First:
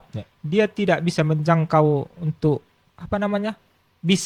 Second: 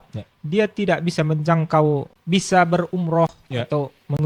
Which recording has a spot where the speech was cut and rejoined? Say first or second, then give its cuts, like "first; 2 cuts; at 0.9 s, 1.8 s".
second; 1 cut; at 2.1 s